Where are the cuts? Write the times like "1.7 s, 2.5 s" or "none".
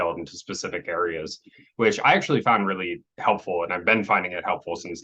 none